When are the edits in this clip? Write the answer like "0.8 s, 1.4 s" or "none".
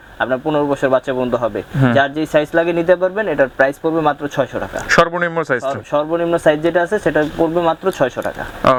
none